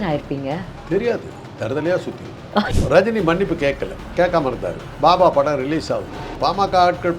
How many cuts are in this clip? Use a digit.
4